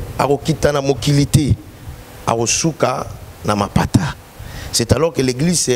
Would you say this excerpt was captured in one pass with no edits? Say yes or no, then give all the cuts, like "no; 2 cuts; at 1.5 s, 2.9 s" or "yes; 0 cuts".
yes; 0 cuts